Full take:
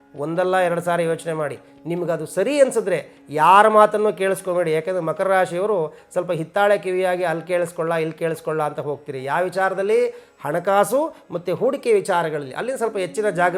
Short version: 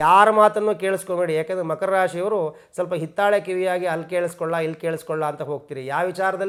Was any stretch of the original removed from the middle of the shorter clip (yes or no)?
no